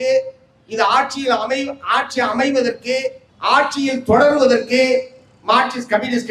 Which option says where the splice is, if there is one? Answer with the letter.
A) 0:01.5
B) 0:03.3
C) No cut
B